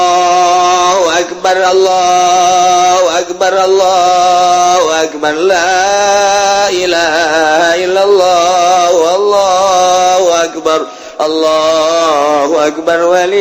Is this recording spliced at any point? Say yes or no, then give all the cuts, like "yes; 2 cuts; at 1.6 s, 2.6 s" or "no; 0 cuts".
no; 0 cuts